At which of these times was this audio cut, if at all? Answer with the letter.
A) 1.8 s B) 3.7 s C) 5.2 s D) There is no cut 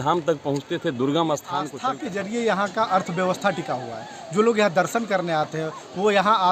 A